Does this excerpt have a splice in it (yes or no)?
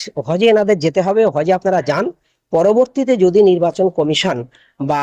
no